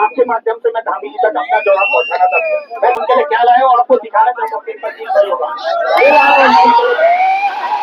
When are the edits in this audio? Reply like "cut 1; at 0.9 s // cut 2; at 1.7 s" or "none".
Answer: cut 1; at 3.0 s